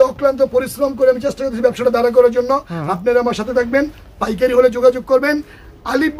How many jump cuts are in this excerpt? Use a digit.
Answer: 0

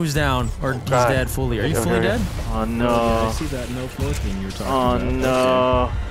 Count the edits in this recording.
1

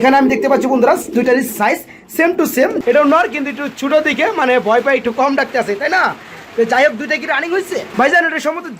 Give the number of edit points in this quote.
2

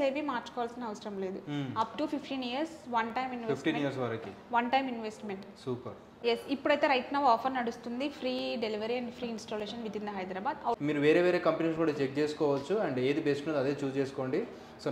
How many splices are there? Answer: 2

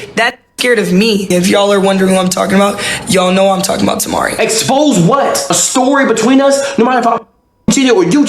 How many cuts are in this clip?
2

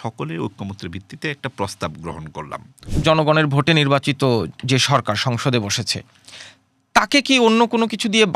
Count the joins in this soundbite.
1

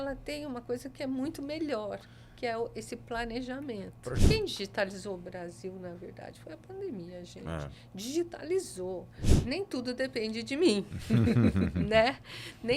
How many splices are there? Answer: 2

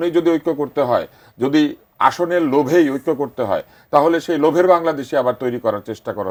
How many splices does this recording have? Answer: 0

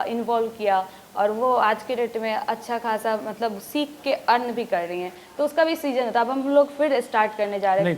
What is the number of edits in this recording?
0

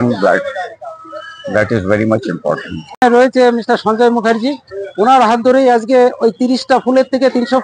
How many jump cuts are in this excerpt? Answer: 1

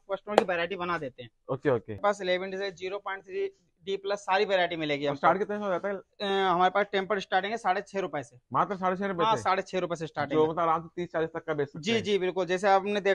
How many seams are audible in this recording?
1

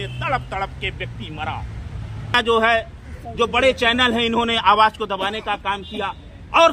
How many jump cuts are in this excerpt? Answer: 1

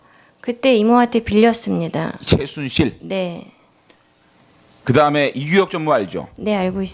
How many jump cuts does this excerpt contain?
1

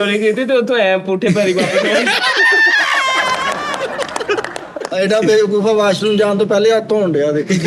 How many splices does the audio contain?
1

